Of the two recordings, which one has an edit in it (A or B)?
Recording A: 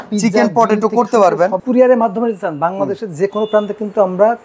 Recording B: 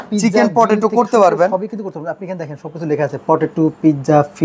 A